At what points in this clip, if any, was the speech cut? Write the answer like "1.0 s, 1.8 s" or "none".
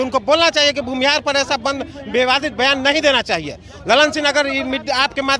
none